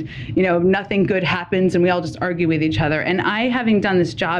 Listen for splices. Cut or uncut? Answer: uncut